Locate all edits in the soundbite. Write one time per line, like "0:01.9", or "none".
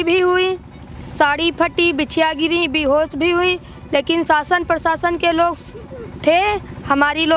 none